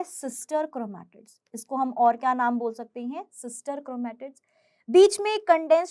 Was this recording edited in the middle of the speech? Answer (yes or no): no